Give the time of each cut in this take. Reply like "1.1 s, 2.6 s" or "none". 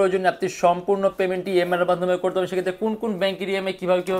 none